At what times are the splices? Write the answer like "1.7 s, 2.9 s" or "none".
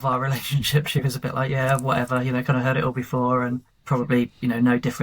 3.7 s